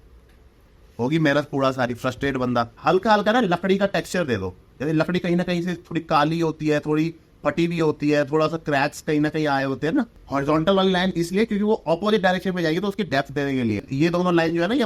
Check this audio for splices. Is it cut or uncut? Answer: cut